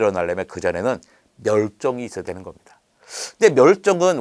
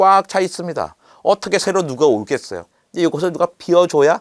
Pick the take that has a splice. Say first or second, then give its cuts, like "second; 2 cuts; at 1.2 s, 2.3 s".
second; 1 cut; at 2.6 s